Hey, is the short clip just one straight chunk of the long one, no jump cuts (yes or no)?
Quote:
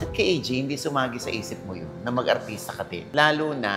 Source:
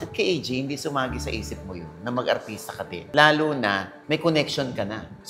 yes